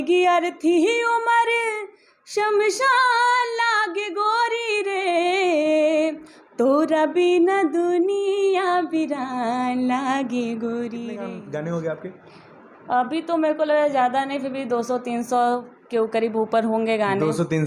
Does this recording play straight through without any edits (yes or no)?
no